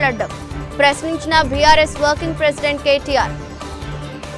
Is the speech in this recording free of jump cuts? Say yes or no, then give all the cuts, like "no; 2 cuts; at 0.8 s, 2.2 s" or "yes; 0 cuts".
yes; 0 cuts